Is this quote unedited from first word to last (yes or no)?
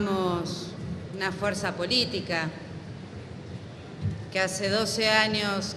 no